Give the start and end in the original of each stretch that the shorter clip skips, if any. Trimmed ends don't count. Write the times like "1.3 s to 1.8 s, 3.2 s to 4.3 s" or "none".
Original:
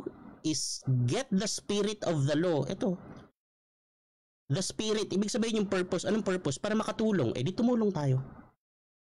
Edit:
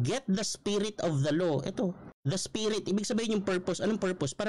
3.1 s to 4.3 s